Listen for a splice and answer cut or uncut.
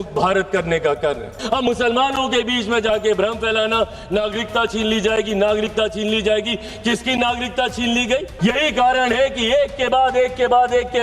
cut